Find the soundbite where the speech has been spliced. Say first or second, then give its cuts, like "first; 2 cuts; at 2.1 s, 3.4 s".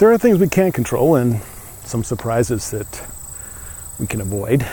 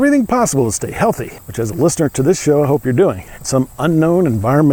second; 2 cuts; at 1.4 s, 3.3 s